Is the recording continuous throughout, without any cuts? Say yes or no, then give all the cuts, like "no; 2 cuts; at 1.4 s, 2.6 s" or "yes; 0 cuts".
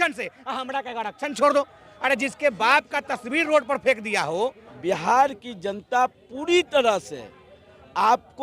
no; 2 cuts; at 1.8 s, 4.7 s